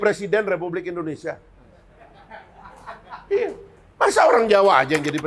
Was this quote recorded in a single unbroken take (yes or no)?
yes